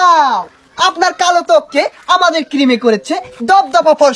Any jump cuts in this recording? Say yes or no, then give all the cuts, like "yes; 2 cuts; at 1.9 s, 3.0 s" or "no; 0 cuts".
no; 0 cuts